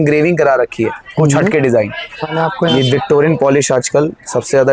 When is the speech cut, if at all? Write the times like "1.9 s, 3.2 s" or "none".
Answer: 2.3 s